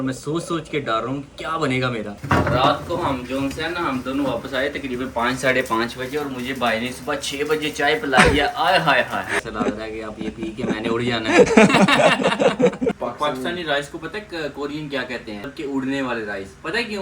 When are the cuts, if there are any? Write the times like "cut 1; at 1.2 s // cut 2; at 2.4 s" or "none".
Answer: cut 1; at 2.1 s // cut 2; at 9.3 s // cut 3; at 13.0 s // cut 4; at 15.5 s